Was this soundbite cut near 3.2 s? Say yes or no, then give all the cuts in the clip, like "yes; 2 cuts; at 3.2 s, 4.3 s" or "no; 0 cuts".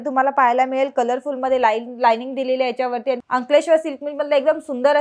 yes; 1 cut; at 3.2 s